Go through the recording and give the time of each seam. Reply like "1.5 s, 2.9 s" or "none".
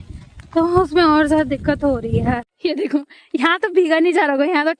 3.0 s